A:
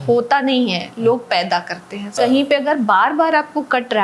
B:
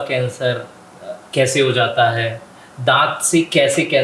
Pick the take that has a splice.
A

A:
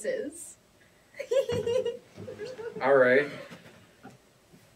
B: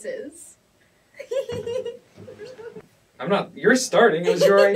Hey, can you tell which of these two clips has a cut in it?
B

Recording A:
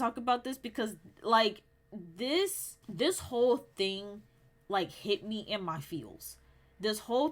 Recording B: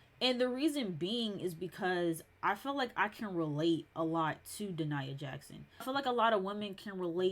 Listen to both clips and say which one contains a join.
B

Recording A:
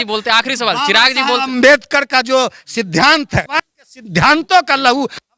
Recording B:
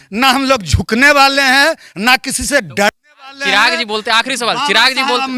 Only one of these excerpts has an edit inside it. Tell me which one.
A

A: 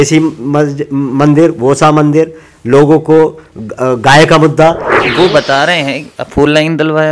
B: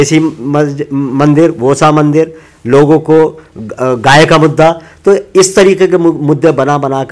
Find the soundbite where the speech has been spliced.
A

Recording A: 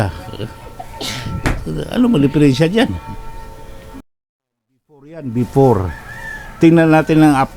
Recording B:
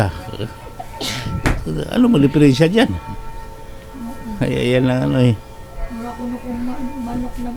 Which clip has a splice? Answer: A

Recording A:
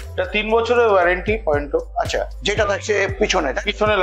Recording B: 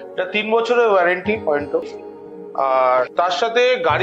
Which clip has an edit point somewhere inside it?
B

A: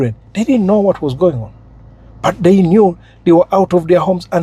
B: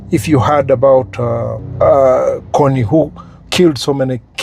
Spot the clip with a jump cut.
B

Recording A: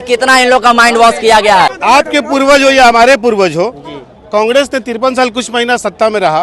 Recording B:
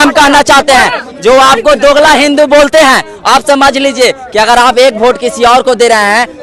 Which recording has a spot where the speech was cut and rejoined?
A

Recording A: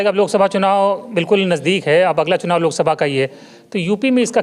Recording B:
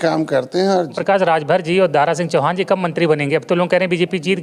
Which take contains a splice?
B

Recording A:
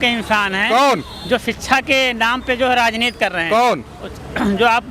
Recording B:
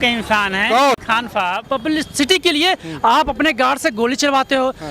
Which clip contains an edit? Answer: B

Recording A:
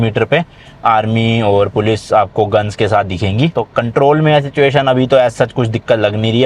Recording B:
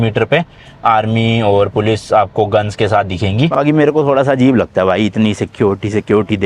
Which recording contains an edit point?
B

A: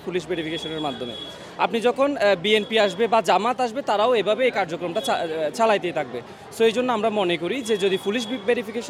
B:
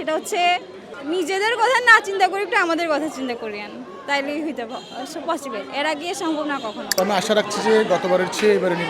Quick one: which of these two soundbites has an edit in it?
B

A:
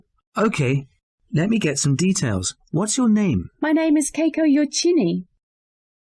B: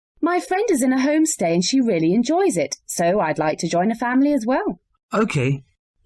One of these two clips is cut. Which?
B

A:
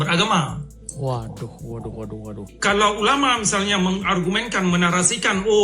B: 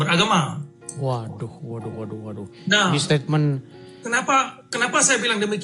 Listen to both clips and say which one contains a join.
A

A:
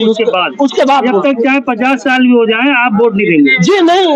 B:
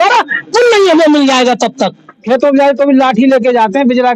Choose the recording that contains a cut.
B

